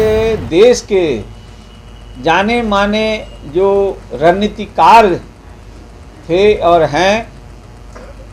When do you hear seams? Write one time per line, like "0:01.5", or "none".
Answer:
none